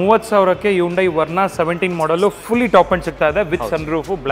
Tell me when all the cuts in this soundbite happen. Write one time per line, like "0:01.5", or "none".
none